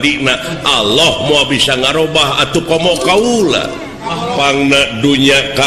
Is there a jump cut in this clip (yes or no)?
yes